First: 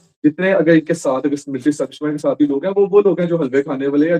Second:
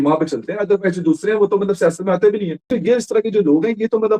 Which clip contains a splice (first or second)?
second